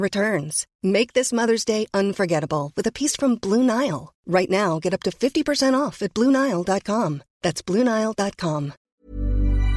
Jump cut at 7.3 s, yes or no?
no